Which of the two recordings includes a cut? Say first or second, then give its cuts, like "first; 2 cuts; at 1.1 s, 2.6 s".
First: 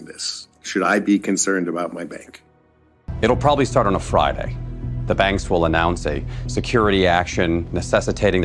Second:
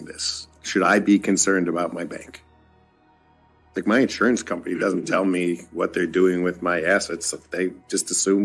first; 1 cut; at 3.0 s